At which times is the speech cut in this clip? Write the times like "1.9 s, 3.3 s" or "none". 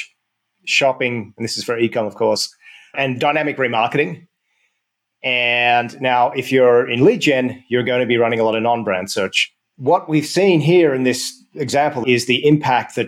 12.0 s